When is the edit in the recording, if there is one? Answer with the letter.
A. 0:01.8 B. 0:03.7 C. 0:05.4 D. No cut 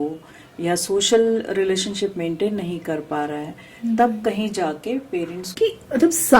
C